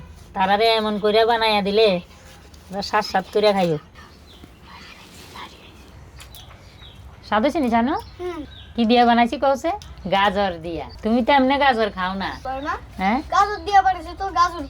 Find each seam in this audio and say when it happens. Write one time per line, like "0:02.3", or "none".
0:05.9
0:09.9
0:12.4